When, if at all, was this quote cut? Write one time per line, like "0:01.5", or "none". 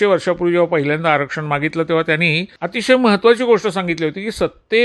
0:02.5